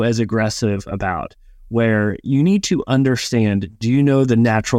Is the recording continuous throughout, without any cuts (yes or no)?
yes